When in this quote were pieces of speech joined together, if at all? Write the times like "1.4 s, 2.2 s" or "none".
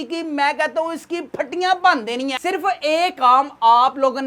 2.4 s